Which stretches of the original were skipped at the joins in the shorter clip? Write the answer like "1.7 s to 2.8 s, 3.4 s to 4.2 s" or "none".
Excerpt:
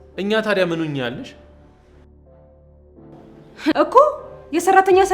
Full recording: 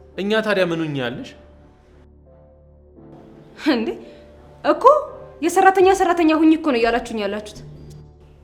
3.7 s to 4.6 s